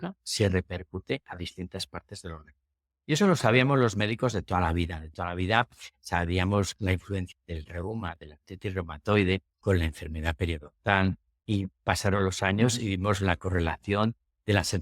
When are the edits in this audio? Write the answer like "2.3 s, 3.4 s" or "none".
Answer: 7.3 s, 9.5 s